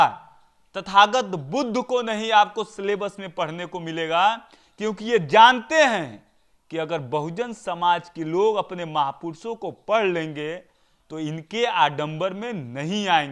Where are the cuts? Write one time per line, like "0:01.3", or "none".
none